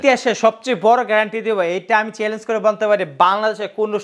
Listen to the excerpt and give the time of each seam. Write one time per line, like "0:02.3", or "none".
none

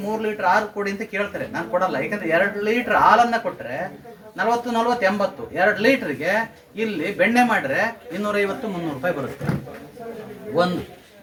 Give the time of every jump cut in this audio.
none

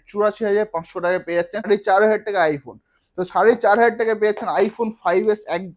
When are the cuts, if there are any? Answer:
0:01.6

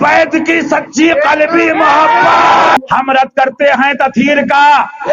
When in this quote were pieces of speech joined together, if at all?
0:02.8

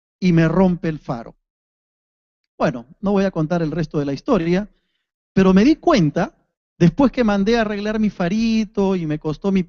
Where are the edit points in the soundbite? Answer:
0:08.3

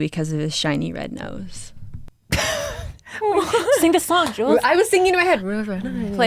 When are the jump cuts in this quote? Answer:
none

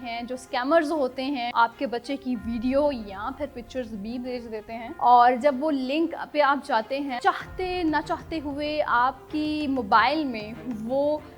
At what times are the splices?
0:01.5
0:04.9
0:07.1

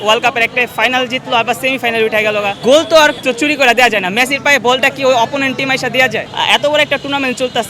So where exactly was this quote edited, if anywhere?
0:02.6
0:03.2
0:06.2

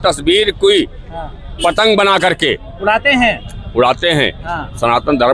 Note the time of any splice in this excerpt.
none

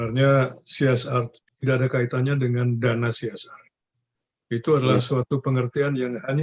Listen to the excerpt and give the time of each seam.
0:01.4

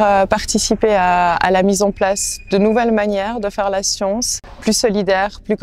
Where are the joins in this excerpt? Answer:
0:04.3

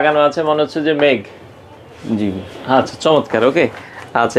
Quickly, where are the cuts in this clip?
none

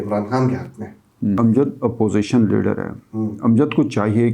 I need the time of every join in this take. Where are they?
0:01.4

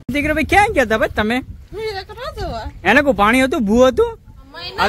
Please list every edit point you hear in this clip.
none

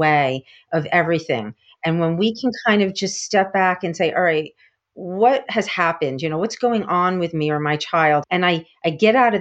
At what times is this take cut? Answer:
0:08.2

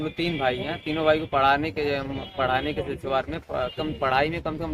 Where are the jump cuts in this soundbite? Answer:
none

